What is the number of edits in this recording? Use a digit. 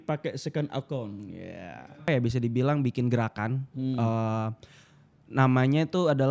1